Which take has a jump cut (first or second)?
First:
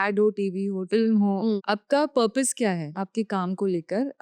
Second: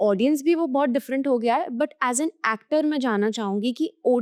first